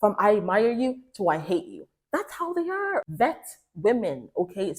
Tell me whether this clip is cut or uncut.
cut